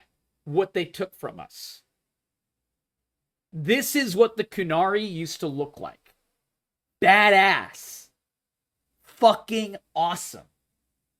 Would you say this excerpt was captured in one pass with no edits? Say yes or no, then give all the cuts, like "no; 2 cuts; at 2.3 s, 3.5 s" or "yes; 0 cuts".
yes; 0 cuts